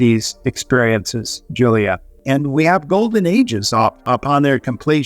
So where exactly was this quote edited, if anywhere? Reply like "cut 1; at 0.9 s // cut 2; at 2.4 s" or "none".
cut 1; at 2.2 s // cut 2; at 4.1 s